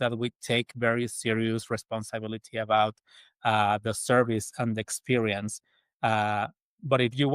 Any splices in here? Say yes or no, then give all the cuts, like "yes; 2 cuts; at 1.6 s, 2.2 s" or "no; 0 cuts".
no; 0 cuts